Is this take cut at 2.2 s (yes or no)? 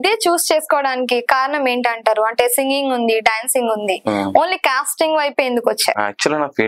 no